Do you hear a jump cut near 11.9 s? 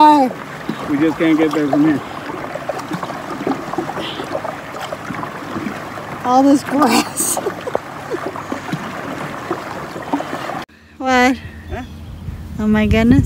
no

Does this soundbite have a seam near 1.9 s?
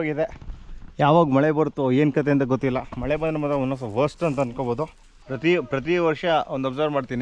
no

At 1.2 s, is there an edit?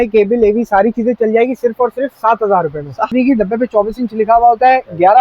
no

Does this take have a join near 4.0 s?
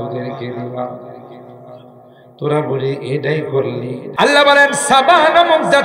yes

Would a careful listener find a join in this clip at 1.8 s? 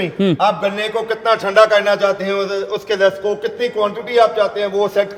no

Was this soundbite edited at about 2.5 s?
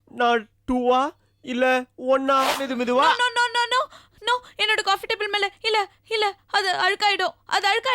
yes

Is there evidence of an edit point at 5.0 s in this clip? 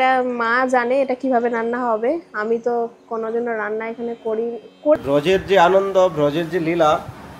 yes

